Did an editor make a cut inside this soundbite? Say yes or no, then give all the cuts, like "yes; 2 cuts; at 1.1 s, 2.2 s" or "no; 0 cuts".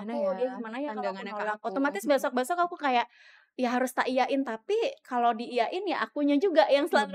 no; 0 cuts